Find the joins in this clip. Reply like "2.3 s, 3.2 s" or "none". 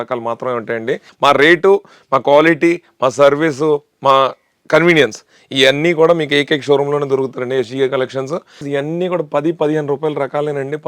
1.1 s, 8.6 s